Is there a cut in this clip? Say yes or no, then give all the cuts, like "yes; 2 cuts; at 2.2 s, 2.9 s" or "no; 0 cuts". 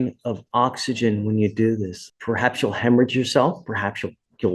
yes; 1 cut; at 2.0 s